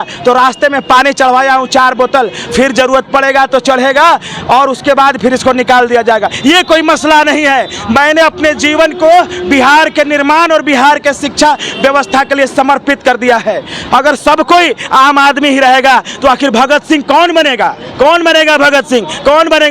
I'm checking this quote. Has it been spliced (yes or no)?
no